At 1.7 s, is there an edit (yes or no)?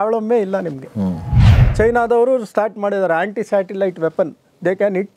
yes